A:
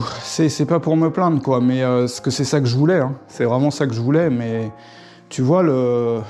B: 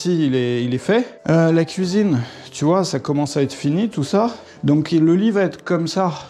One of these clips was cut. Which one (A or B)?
B